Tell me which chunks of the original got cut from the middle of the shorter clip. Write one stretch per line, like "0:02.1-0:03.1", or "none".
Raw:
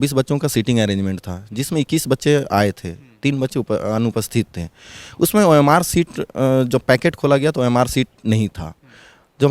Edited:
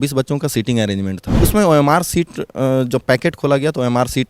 0:01.2-0:05.0